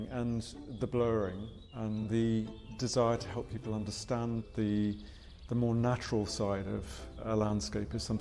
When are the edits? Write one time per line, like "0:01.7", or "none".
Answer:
0:04.4
0:07.2